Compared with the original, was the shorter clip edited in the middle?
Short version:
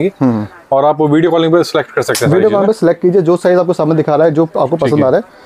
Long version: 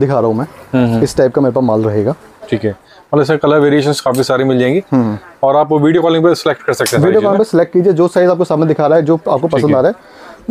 no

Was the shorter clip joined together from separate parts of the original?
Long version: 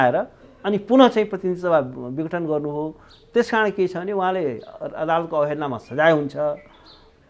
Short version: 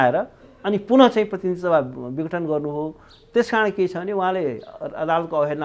no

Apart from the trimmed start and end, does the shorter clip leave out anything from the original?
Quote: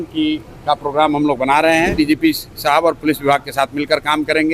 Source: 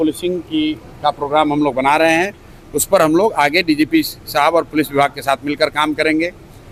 yes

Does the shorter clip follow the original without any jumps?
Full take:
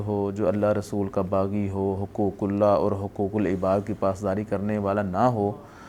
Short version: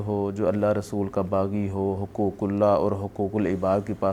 yes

